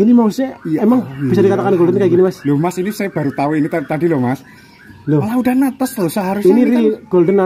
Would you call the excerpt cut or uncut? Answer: uncut